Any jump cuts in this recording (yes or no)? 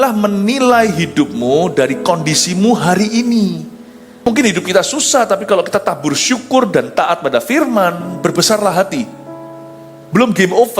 yes